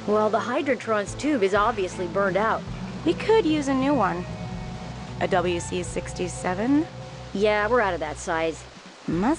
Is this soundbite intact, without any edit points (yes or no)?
yes